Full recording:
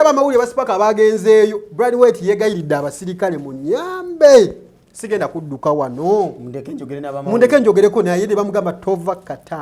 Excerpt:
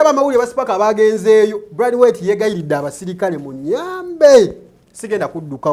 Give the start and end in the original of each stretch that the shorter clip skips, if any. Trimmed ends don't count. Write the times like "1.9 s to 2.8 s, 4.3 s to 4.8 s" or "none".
none